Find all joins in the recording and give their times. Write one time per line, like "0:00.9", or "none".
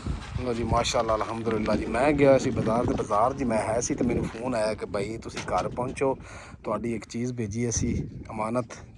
none